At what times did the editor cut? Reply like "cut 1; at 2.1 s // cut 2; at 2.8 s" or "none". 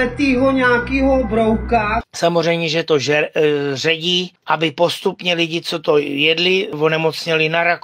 cut 1; at 6.8 s